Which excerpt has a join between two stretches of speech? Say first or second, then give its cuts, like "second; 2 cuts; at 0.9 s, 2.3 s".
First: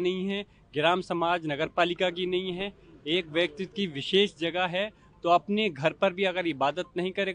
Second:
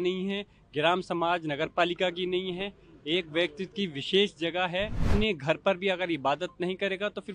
second; 1 cut; at 5.1 s